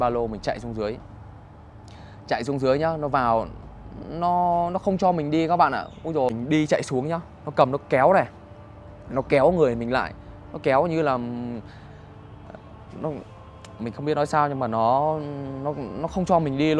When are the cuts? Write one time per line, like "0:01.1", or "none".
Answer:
0:06.3

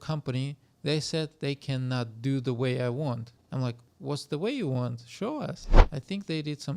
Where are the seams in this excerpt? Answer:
0:05.7

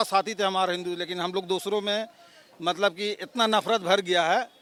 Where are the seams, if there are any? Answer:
none

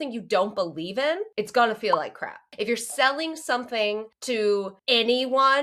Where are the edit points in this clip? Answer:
0:01.3
0:02.4
0:04.1
0:04.8

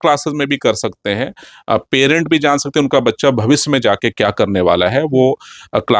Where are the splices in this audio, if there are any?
none

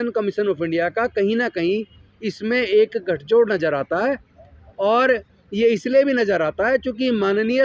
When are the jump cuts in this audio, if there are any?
none

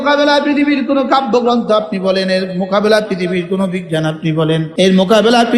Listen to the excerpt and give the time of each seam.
0:04.7

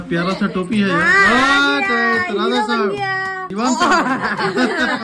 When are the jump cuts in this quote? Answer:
none

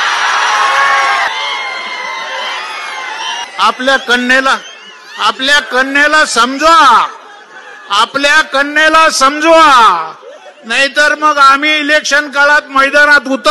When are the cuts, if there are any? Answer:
0:01.3
0:03.5

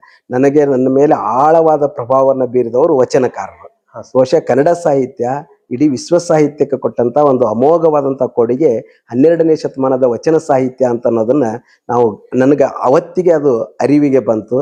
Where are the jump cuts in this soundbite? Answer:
none

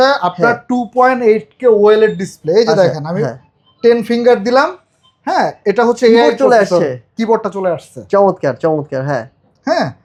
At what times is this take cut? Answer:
none

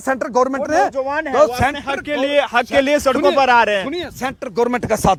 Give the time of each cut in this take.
none

